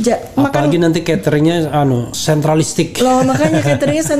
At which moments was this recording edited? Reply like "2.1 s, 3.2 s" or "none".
2.1 s